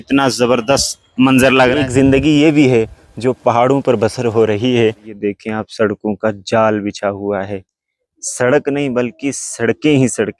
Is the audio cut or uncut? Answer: cut